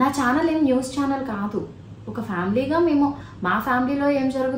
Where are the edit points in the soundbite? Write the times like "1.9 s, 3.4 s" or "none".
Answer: none